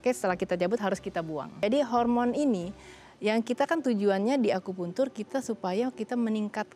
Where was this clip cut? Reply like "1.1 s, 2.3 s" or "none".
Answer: 1.6 s